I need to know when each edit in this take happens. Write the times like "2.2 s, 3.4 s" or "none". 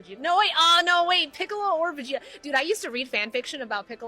2.3 s